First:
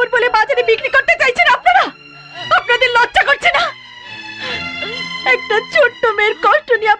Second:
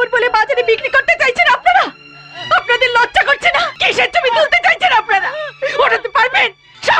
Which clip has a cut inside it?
second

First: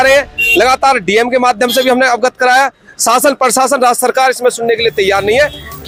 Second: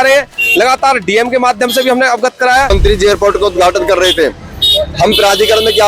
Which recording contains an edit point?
second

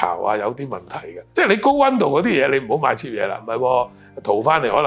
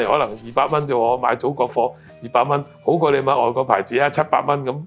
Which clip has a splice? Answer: first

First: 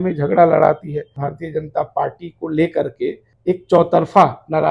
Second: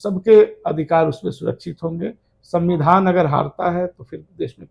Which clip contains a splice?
first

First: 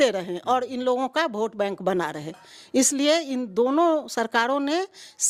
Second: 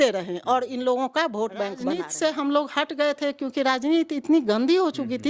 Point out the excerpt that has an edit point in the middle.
second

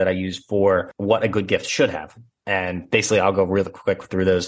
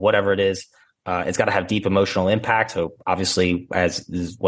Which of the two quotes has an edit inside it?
first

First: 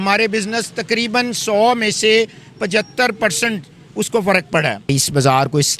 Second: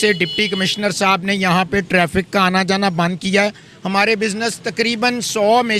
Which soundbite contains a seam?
first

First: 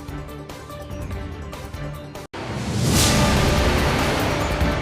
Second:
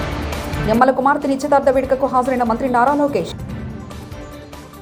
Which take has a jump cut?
first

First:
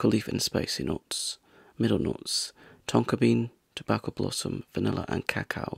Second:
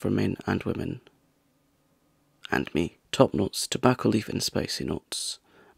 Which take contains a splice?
second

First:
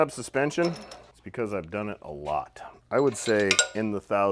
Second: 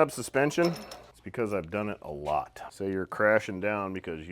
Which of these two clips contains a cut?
second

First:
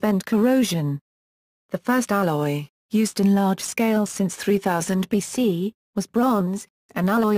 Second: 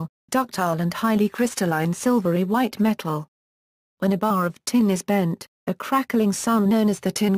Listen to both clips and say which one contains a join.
first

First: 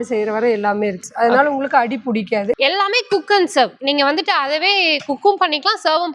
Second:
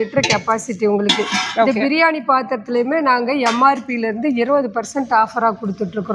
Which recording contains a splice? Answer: first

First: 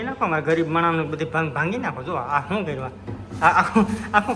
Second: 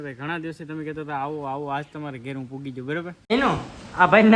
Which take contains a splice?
second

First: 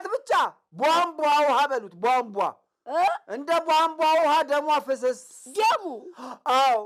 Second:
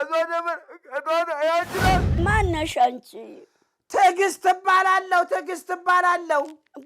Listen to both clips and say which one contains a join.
second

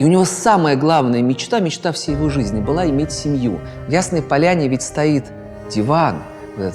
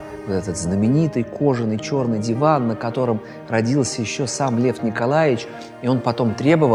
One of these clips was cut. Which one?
first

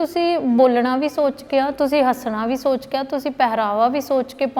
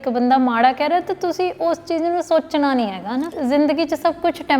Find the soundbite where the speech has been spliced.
second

